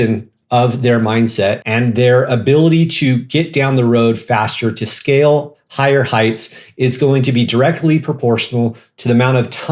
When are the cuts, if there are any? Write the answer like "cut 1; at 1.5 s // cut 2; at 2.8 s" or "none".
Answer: cut 1; at 1.7 s